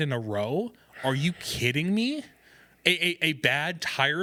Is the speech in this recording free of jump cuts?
yes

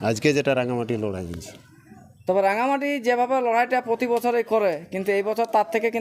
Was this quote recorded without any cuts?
yes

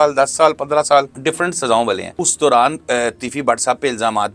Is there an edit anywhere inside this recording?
yes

